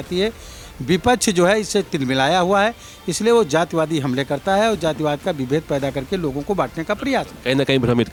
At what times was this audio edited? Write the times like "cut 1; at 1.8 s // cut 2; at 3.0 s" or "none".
none